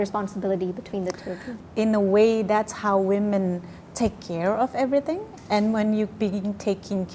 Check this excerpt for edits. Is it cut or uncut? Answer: cut